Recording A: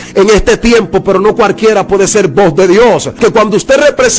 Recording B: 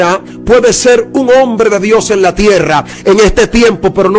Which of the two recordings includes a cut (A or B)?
A